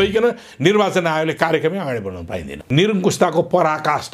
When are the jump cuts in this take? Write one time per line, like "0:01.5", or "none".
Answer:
0:02.6

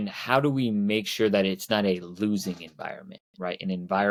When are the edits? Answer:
none

